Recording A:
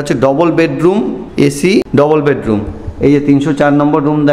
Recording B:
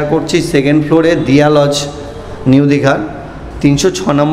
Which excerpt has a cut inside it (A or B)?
A